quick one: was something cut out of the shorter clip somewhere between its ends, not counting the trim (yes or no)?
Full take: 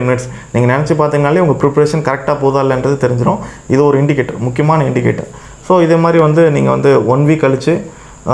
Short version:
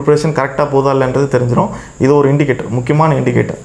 no